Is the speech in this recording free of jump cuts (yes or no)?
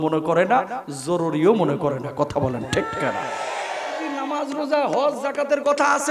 no